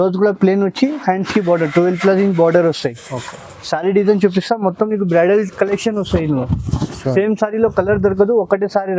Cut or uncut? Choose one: uncut